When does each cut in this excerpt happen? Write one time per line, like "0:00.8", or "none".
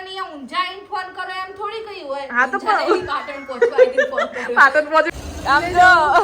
0:05.1